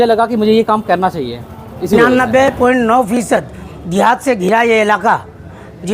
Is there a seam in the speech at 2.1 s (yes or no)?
yes